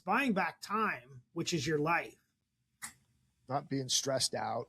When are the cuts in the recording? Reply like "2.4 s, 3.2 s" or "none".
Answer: none